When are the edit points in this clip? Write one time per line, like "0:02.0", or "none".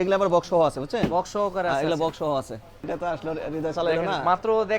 0:02.9